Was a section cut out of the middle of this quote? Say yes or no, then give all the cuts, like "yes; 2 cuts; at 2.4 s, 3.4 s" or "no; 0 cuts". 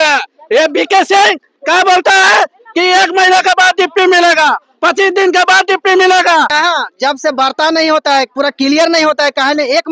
yes; 1 cut; at 6.5 s